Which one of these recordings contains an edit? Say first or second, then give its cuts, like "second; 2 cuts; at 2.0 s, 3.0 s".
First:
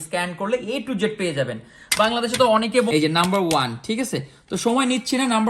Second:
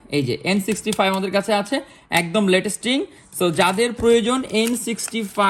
first; 1 cut; at 2.9 s